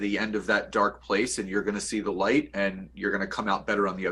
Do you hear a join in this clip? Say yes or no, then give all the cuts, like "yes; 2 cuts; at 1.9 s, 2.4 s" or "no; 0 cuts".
no; 0 cuts